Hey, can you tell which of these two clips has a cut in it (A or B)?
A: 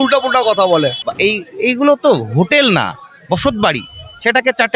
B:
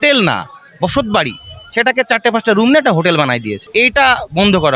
A